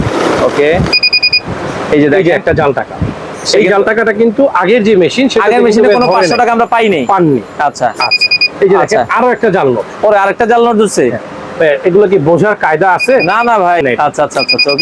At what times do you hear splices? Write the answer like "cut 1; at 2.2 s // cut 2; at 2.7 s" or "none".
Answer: cut 1; at 13.8 s

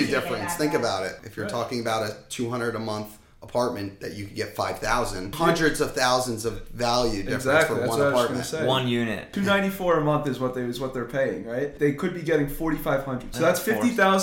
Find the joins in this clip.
cut 1; at 1.2 s // cut 2; at 5.3 s // cut 3; at 9.3 s // cut 4; at 11.7 s // cut 5; at 13.3 s

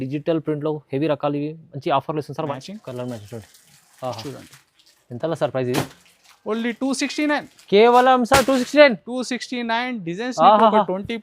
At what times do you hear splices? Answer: cut 1; at 2.5 s

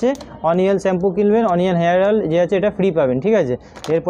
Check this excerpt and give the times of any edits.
none

